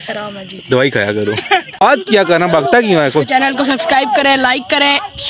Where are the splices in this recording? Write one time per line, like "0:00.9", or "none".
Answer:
0:01.8